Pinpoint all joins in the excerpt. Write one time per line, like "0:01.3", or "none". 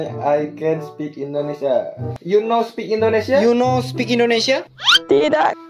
0:02.0

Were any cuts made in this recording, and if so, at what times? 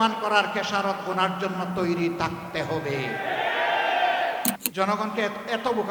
0:04.6

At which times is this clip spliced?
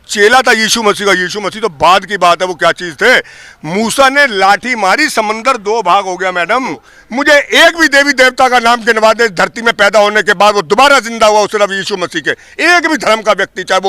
0:06.9

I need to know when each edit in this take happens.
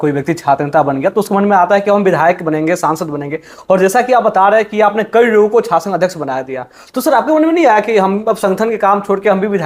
none

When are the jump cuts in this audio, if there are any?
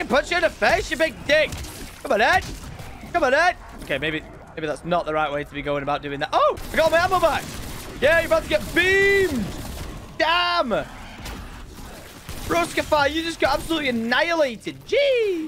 0:03.7
0:06.6

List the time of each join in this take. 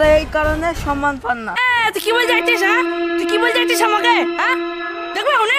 none

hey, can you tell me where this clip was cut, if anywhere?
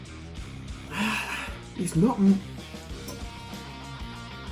0:00.9

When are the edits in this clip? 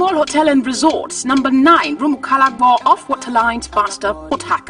none

